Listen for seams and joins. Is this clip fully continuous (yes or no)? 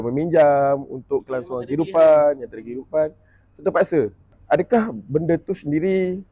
no